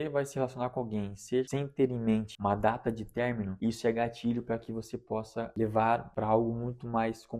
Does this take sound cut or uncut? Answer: cut